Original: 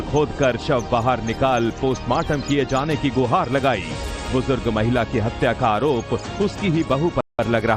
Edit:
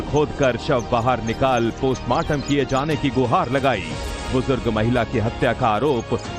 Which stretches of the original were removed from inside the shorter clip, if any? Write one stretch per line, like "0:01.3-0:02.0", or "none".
none